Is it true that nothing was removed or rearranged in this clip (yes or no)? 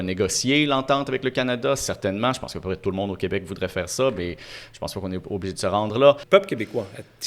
no